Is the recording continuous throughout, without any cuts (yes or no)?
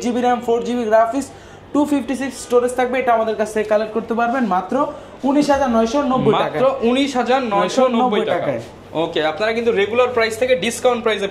yes